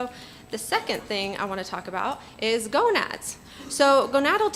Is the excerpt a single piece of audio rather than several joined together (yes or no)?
yes